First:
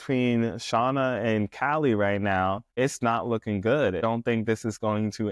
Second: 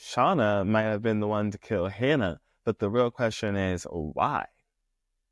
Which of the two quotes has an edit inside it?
first; 2 cuts; at 2.7 s, 4.0 s

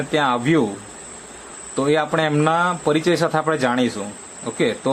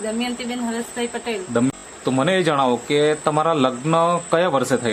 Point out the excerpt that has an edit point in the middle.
second; 1 cut; at 1.7 s

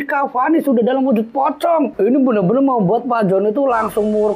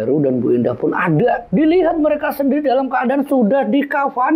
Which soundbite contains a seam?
first; 1 cut; at 1.9 s

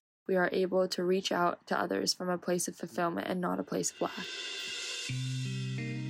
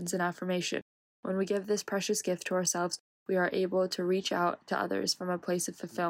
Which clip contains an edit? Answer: first; 1 cut; at 4.4 s

